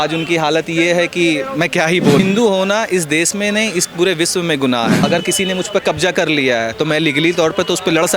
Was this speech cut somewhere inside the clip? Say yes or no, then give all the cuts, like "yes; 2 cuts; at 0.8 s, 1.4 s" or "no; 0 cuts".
yes; 2 cuts; at 2.2 s, 5.0 s